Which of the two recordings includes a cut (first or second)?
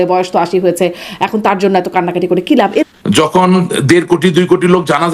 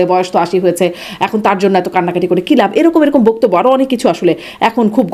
first